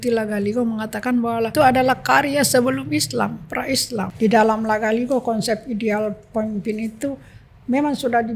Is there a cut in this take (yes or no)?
yes